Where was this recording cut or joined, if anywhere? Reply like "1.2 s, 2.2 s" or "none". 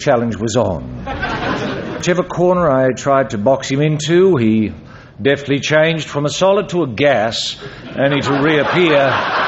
2.0 s